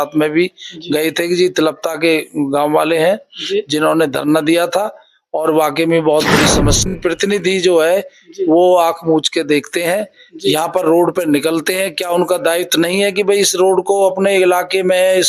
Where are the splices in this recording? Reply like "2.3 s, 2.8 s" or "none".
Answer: 6.9 s

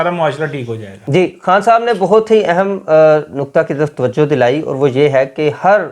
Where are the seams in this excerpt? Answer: none

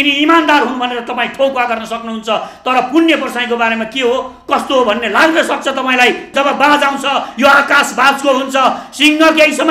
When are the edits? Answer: 6.3 s

